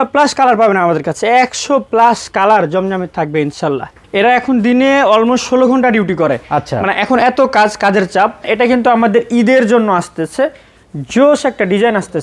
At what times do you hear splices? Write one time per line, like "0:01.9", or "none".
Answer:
0:03.9
0:08.4